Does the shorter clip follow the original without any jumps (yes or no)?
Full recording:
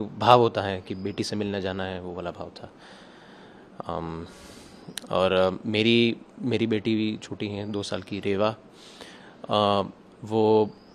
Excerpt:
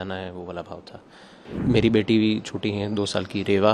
no